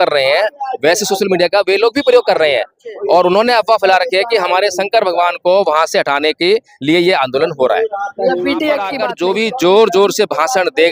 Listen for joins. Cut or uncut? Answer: cut